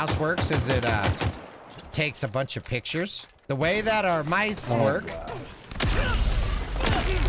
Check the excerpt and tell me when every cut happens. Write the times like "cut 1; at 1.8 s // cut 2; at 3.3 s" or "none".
cut 1; at 3.4 s